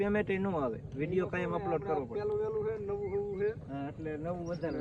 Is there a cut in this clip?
no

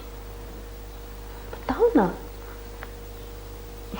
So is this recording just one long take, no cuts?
yes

